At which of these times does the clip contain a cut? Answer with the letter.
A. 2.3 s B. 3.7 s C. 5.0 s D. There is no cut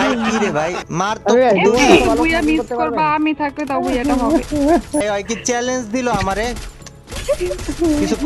C